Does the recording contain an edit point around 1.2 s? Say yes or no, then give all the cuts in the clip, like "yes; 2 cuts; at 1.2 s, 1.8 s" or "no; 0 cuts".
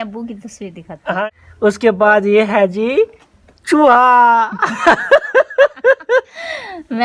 yes; 1 cut; at 1.2 s